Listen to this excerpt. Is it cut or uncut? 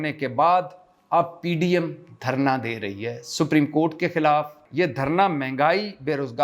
cut